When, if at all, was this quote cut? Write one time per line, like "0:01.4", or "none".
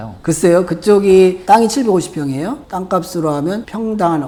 none